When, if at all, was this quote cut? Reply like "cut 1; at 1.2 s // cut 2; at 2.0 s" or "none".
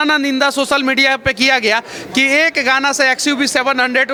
none